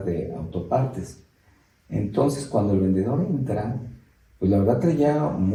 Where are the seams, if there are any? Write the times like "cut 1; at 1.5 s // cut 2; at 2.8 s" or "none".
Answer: none

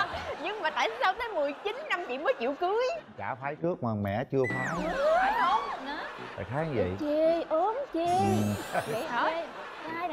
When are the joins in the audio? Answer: none

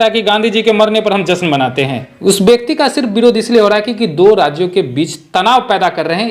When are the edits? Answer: cut 1; at 2.1 s

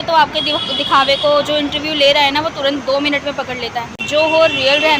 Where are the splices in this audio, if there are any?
cut 1; at 4.1 s

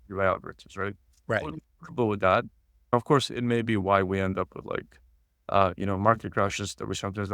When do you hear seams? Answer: cut 1; at 2.7 s

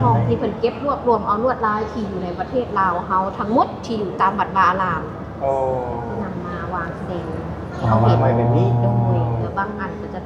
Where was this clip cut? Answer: none

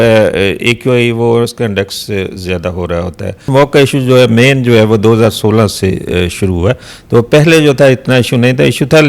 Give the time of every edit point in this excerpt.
cut 1; at 3.4 s

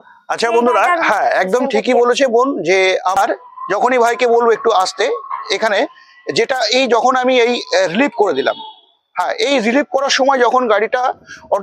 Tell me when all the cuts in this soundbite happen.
cut 1; at 3.2 s

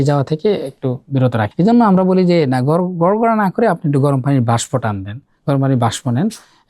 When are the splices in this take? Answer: cut 1; at 1.5 s

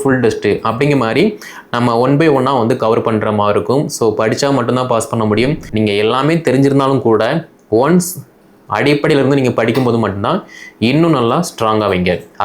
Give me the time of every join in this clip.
cut 1; at 5.6 s

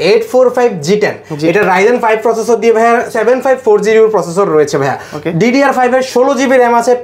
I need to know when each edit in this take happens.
none

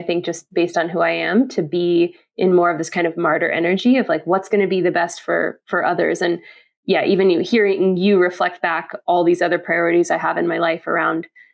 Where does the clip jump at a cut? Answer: none

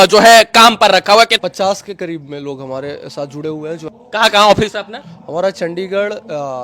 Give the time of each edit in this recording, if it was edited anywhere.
cut 1; at 1.4 s // cut 2; at 3.9 s

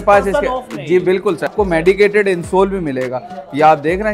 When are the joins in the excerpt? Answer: cut 1; at 1.5 s

